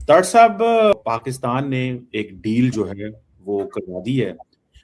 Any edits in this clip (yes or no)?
yes